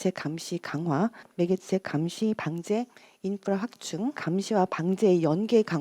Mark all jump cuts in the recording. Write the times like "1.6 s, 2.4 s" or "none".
1.3 s, 4.2 s